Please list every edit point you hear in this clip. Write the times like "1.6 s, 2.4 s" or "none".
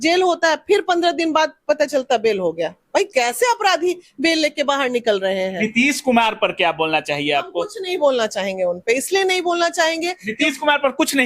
5.5 s